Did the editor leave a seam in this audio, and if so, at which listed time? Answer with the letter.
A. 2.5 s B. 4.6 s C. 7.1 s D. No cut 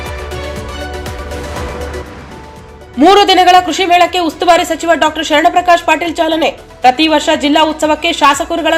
A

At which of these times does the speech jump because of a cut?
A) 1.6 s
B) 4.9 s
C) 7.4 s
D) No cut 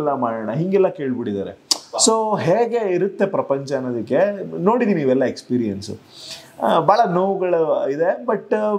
D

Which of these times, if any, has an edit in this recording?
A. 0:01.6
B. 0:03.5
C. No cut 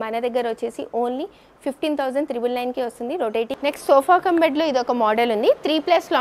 B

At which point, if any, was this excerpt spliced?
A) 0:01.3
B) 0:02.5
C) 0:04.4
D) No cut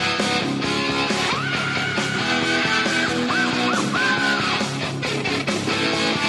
C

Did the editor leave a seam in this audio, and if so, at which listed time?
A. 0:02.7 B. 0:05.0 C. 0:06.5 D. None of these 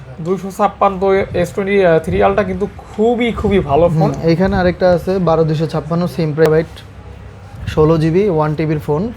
C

